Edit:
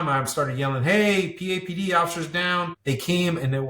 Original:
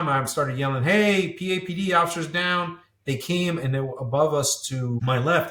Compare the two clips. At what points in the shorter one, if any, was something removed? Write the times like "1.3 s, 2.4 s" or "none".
2.8 s